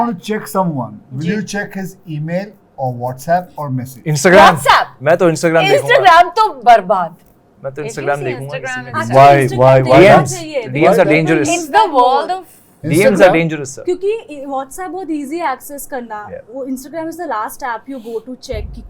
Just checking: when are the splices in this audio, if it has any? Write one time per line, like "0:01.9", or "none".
none